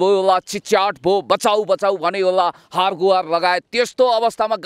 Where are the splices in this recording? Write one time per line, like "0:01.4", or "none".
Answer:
none